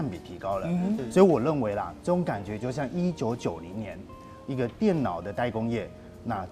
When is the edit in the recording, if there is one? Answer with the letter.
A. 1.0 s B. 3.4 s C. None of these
A